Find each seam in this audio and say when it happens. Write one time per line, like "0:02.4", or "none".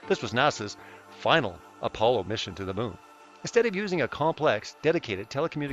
0:04.1